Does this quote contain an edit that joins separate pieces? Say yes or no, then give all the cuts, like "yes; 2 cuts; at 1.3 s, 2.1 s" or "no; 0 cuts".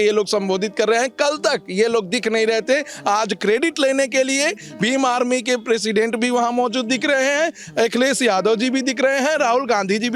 no; 0 cuts